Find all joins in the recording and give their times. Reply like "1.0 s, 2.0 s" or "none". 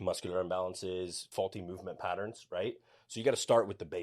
1.2 s